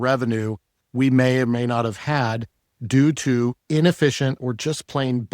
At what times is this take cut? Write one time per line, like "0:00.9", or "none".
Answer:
0:04.4